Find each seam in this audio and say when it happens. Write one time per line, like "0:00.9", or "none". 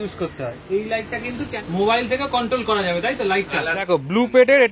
0:01.5
0:03.7